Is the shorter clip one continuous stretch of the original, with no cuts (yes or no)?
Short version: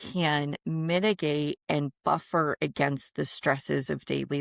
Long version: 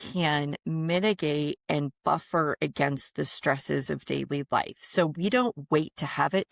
yes